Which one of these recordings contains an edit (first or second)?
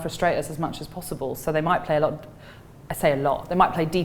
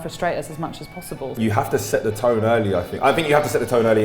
second